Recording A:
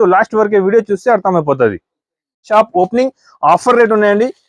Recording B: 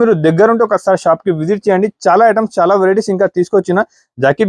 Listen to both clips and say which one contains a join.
A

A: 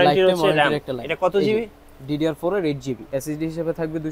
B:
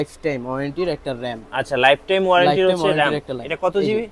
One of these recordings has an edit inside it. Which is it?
A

